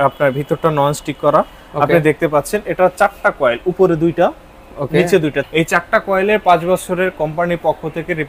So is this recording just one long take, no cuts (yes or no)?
no